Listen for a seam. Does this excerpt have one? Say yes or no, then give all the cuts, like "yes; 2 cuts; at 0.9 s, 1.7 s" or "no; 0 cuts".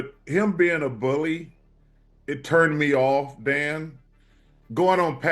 yes; 1 cut; at 4.0 s